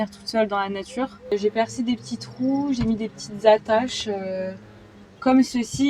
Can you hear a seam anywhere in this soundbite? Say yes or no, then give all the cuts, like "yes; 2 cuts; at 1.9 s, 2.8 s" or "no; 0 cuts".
yes; 1 cut; at 1.3 s